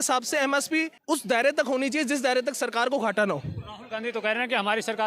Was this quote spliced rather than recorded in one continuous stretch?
yes; 1 cut; at 0.9 s

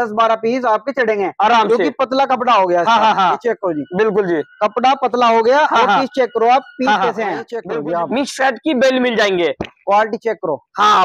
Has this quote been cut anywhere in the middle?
yes; 1 cut; at 7.6 s

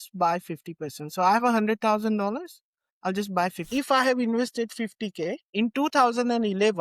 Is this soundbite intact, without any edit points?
no; 2 cuts; at 3.6 s, 5.4 s

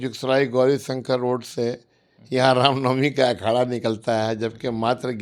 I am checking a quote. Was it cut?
no; 0 cuts

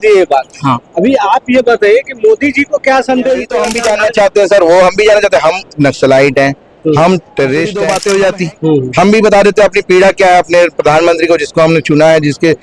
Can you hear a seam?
yes; 2 cuts; at 3.6 s, 7.8 s

